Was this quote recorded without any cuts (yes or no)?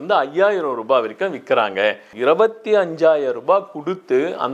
no